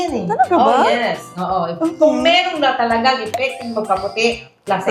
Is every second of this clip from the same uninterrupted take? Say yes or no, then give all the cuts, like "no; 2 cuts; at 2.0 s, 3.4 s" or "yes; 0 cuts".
yes; 0 cuts